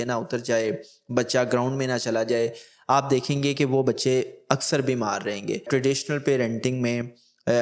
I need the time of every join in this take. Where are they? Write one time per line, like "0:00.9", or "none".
0:05.7